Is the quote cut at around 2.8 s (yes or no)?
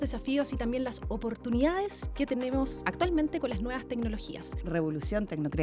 yes